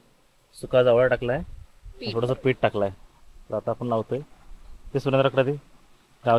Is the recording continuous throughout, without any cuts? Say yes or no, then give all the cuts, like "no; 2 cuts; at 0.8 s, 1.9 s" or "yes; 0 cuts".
yes; 0 cuts